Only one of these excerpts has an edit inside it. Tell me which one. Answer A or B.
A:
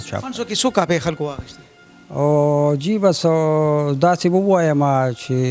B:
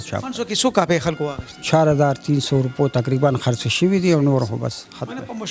B